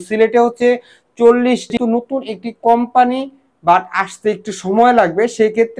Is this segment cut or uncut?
cut